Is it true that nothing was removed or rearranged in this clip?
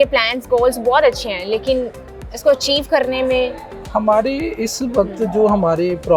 yes; 0 cuts

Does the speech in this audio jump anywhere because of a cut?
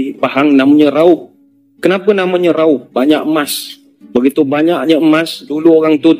no; 0 cuts

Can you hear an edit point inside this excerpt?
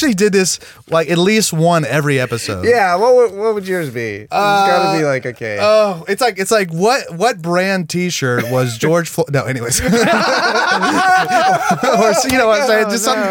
no; 0 cuts

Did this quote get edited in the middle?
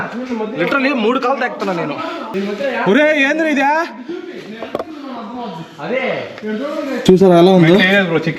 yes; 1 cut; at 2.2 s

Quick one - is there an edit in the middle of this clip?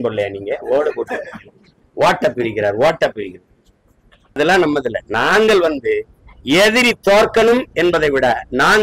yes; 1 cut; at 4.4 s

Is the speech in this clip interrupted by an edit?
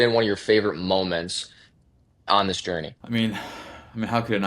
yes; 1 cut; at 3.0 s

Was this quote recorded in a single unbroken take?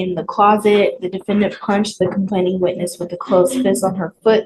yes; 0 cuts

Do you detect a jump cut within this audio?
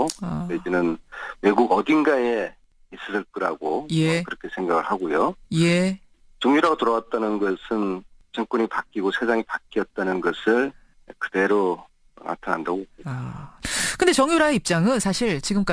no; 0 cuts

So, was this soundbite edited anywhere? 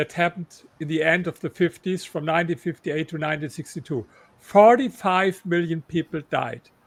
no; 0 cuts

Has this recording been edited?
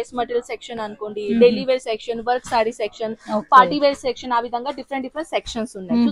no; 0 cuts

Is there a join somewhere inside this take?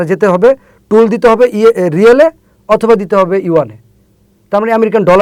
no; 0 cuts

